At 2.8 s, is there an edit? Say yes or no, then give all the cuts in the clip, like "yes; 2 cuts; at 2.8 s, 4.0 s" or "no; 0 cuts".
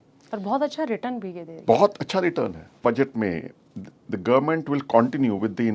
yes; 1 cut; at 2.8 s